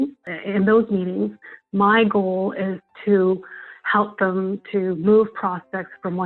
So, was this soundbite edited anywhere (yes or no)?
no